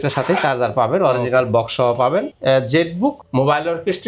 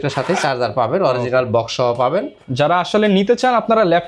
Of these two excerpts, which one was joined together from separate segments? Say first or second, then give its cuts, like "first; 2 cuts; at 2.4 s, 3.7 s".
first; 1 cut; at 2.3 s